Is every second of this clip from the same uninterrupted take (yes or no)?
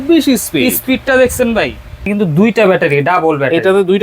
no